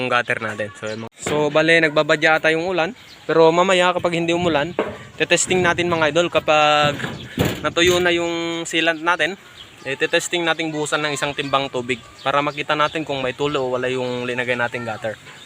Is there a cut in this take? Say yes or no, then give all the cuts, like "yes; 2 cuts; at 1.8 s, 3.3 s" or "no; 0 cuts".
yes; 1 cut; at 1.0 s